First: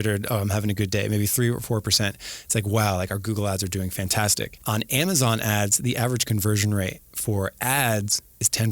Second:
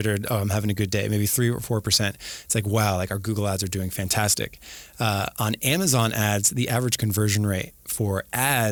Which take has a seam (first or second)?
first